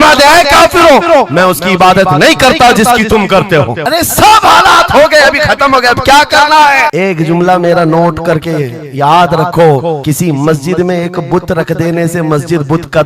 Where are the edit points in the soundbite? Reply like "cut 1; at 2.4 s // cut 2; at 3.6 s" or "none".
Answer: none

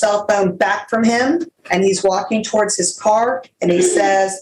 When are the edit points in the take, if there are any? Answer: cut 1; at 1.6 s

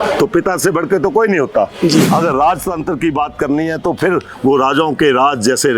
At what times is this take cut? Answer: cut 1; at 2.1 s

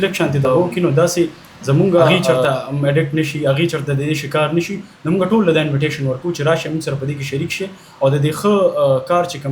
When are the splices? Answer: cut 1; at 2.4 s

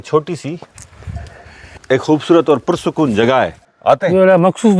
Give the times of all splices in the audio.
cut 1; at 1.8 s // cut 2; at 3.6 s

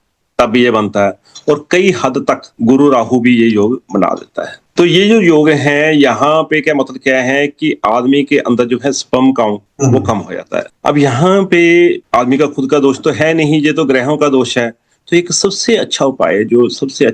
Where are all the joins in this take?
none

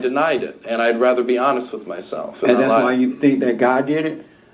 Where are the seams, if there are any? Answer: none

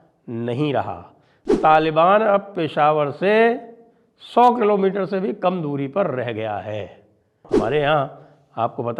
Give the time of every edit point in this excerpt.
cut 1; at 1.5 s // cut 2; at 7.4 s

